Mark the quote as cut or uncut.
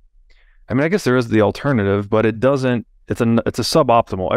uncut